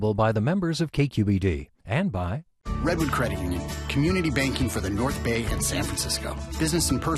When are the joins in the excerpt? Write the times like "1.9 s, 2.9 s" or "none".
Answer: 2.5 s